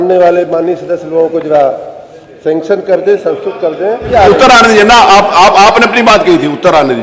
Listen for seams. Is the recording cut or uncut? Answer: cut